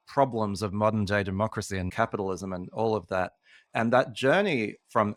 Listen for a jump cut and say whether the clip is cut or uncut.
uncut